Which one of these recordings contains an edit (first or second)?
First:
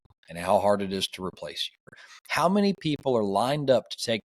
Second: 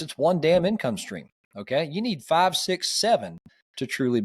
first